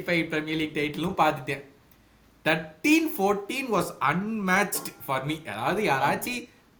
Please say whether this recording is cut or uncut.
uncut